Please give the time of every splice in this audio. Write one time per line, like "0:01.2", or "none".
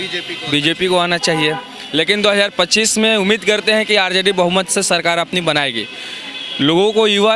none